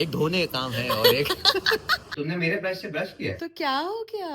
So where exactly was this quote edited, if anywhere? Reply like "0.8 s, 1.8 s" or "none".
2.0 s, 3.4 s